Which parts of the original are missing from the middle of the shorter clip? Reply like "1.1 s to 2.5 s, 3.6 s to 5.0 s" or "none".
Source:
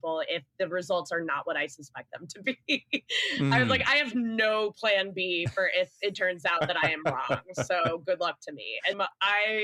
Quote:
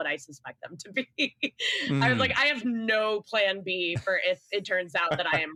none